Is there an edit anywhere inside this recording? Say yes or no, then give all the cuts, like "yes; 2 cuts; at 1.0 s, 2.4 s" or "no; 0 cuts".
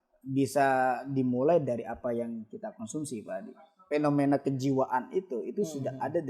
yes; 1 cut; at 3.7 s